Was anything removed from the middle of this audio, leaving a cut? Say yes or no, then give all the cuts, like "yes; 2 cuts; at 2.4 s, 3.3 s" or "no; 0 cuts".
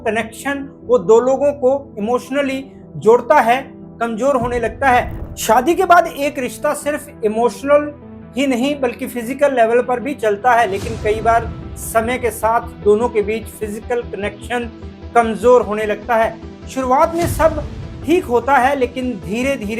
yes; 1 cut; at 5.2 s